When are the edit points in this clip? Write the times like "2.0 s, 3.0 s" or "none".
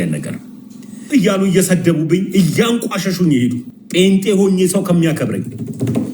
1.0 s, 3.7 s